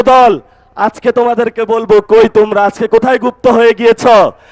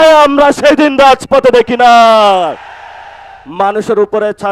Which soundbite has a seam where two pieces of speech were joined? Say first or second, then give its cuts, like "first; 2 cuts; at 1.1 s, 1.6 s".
second; 1 cut; at 3.4 s